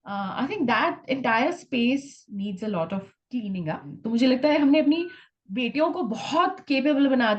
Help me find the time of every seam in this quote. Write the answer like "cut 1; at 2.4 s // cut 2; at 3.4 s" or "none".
cut 1; at 4.0 s